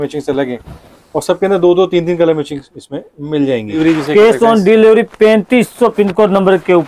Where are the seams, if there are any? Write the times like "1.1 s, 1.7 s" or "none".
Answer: 3.8 s